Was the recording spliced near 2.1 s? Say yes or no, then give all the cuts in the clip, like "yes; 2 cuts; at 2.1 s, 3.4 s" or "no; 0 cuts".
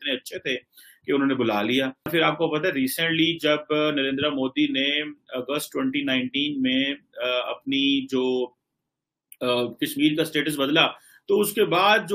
yes; 1 cut; at 2.1 s